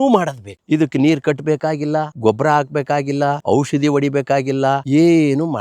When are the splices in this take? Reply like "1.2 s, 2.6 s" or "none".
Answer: 2.1 s, 3.4 s, 4.8 s